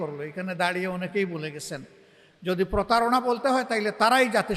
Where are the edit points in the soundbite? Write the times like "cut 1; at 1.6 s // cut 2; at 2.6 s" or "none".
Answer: none